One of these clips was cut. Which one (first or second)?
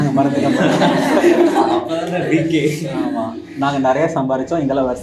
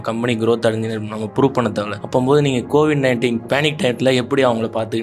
second